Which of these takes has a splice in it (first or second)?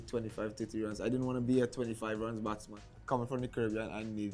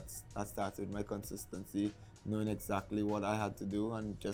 first